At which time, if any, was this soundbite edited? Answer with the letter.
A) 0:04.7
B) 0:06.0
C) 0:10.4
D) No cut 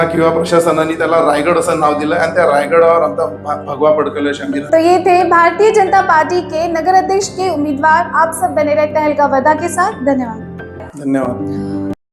D